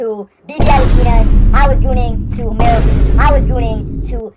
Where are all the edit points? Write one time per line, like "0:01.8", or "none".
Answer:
none